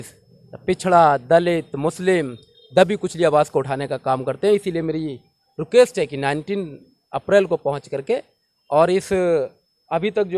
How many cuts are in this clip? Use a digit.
0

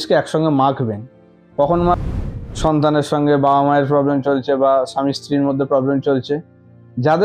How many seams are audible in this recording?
1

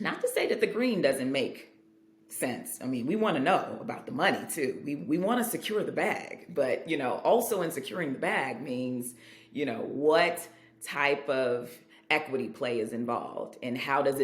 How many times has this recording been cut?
0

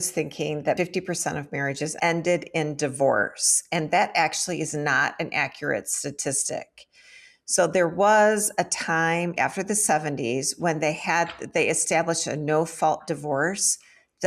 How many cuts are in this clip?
3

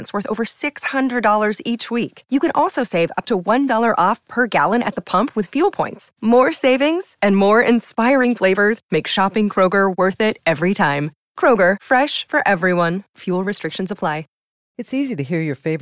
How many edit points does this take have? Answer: 1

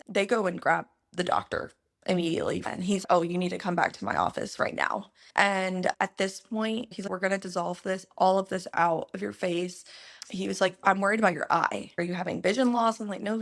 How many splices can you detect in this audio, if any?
4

